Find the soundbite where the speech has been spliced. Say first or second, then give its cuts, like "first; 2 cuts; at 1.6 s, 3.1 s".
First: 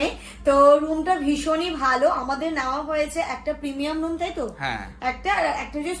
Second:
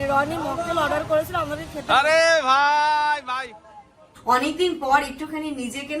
second; 1 cut; at 4.1 s